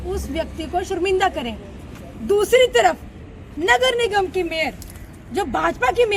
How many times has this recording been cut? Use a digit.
0